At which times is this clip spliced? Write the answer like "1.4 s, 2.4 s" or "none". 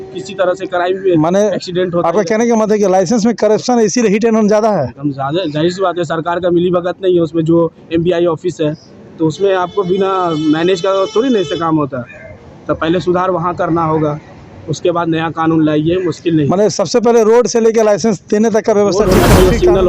19.0 s